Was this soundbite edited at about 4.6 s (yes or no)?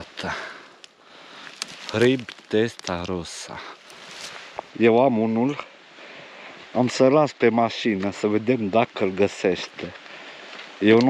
yes